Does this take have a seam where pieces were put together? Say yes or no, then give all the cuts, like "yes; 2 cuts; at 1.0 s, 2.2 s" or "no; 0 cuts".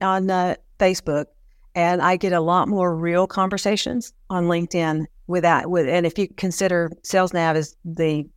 no; 0 cuts